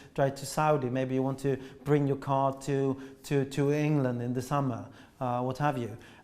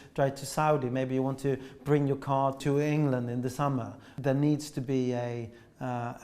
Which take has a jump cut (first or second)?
second